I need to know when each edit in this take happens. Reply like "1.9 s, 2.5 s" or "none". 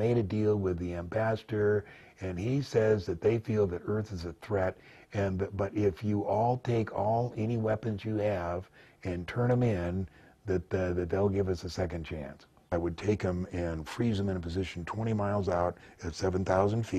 12.5 s